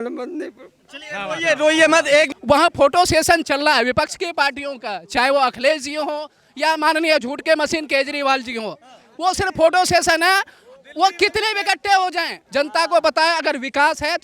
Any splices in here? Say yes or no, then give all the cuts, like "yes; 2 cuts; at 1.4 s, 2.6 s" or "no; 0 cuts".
yes; 2 cuts; at 2.4 s, 12.3 s